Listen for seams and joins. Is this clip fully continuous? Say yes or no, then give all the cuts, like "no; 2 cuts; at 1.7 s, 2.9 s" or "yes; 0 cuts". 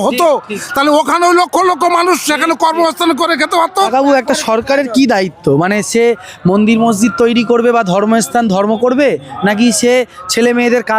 no; 1 cut; at 3.9 s